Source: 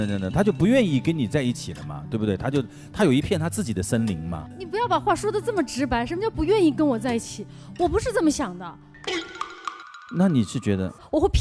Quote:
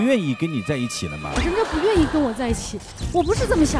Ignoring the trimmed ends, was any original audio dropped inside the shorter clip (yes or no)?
yes